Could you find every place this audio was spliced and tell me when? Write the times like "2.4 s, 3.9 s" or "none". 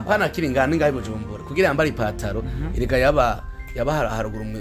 none